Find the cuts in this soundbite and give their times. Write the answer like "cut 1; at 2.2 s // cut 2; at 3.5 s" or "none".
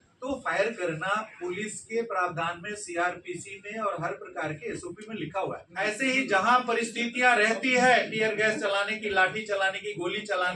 cut 1; at 5.7 s